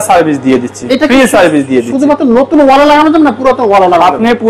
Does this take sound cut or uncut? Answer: uncut